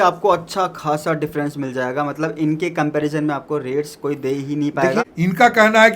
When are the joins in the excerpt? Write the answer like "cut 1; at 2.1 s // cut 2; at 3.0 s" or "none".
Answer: cut 1; at 5.0 s